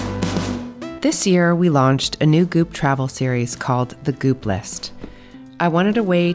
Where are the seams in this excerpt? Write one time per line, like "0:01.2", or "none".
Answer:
0:00.9